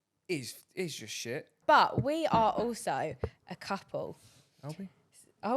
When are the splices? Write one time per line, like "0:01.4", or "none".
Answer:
0:01.6